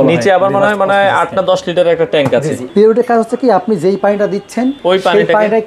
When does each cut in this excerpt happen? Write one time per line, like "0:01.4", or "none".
0:02.7
0:04.8